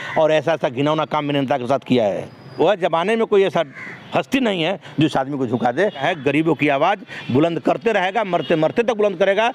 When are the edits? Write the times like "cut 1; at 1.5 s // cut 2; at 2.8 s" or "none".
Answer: cut 1; at 2.5 s // cut 2; at 6.0 s